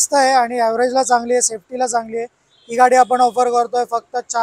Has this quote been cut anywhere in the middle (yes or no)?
no